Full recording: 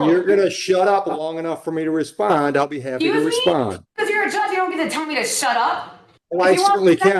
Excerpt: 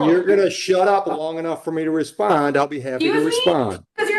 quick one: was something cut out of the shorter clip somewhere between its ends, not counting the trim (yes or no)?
no